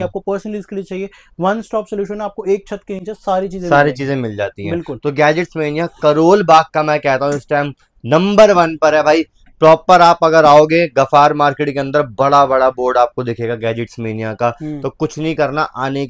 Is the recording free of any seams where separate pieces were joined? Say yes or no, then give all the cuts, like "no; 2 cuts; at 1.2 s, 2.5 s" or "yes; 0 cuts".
yes; 0 cuts